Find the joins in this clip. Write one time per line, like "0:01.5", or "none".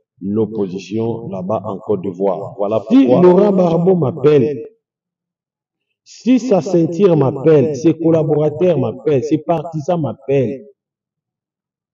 0:02.9